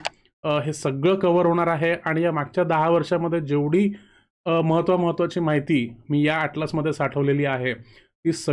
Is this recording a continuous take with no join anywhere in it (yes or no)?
yes